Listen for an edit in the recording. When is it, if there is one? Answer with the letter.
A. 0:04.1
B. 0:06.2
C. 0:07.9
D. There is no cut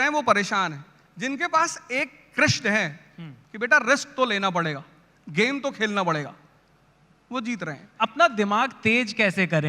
C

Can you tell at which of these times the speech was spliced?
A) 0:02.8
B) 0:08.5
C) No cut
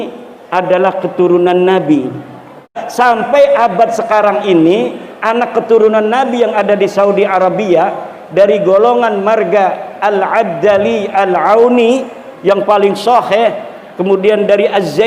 A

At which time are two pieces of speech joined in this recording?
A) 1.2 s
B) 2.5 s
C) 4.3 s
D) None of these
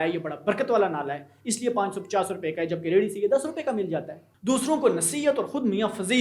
C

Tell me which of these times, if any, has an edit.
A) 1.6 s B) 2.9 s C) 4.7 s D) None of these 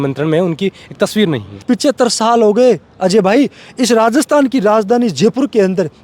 A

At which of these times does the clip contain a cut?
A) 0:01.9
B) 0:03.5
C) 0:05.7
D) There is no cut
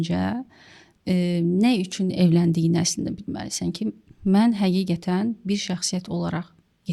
D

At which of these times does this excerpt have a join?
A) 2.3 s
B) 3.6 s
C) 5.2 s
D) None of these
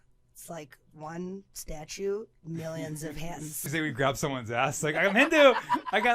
B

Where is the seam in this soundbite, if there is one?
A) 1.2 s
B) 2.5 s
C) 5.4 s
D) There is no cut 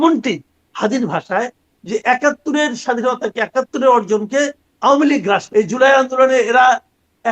C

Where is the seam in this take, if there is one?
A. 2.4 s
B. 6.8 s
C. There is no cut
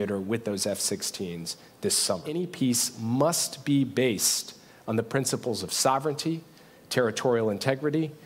A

